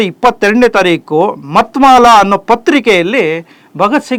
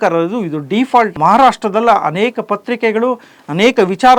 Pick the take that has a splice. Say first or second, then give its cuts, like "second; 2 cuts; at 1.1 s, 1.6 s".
second; 1 cut; at 1.1 s